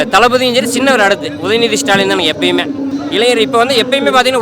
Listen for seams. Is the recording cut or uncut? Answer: cut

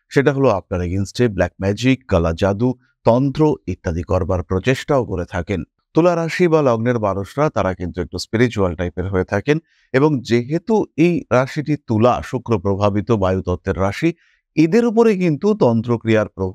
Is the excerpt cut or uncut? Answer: uncut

